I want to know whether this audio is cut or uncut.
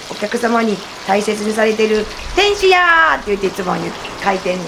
uncut